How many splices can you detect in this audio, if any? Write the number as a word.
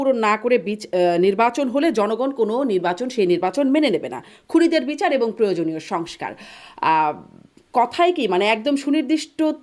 zero